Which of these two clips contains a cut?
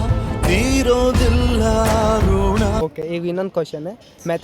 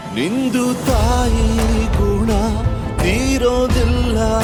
first; 1 cut; at 2.9 s

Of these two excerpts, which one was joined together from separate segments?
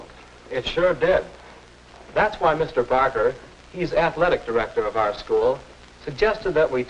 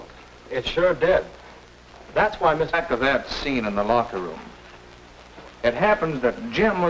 first; 1 cut; at 2.7 s

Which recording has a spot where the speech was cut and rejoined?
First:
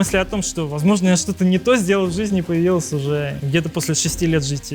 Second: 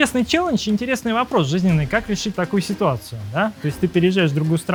first; 1 cut; at 3.4 s

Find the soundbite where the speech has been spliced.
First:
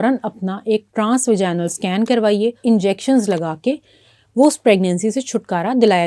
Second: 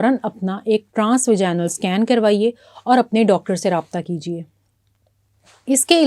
first; 1 cut; at 2.6 s

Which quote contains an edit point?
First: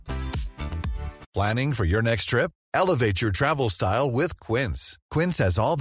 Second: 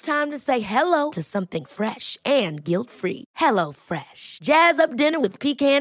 first; 1 cut; at 1.2 s

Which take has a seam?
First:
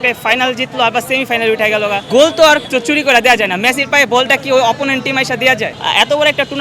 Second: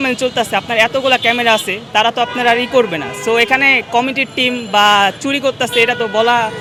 first; 3 cuts; at 2.1 s, 2.6 s, 5.7 s

